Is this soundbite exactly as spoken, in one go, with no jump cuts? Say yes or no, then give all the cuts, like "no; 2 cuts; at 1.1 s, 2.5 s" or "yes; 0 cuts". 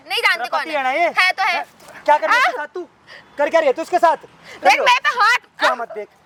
yes; 0 cuts